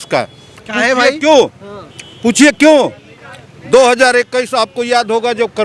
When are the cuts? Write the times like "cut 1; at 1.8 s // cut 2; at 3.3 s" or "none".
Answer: none